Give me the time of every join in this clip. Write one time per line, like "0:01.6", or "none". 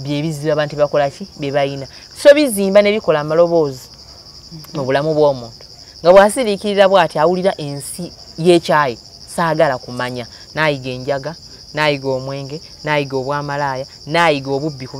none